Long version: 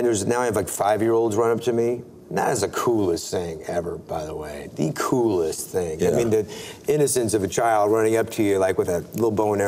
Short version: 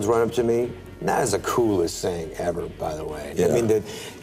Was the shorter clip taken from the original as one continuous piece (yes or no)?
no